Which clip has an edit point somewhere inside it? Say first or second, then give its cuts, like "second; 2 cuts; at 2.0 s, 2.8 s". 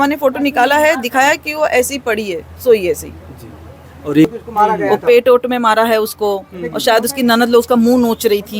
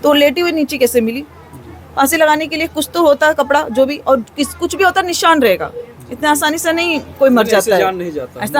first; 1 cut; at 4.3 s